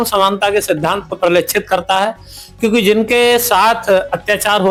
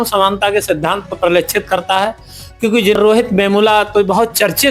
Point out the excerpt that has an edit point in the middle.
second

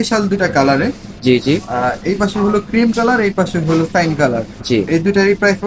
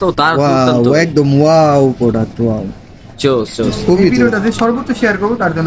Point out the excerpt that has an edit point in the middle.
second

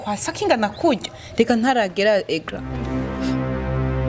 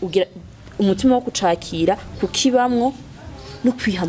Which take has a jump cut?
first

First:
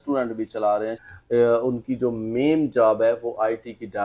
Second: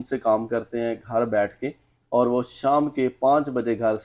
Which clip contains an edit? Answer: first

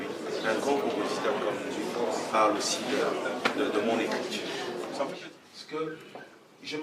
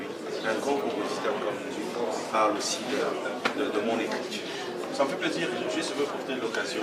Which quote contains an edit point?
first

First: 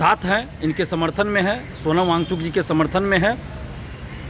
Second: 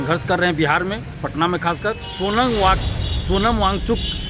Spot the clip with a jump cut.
second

